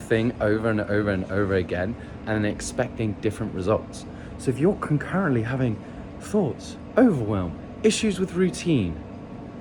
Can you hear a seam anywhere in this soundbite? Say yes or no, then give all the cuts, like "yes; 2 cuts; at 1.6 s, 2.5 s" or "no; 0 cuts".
no; 0 cuts